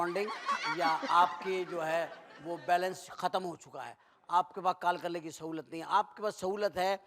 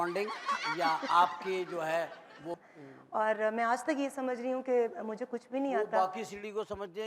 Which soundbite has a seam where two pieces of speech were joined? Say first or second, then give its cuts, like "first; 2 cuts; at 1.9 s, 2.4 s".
second; 1 cut; at 2.6 s